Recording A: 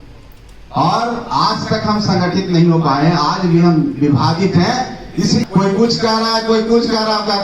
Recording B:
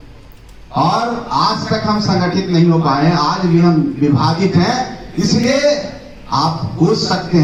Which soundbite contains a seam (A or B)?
A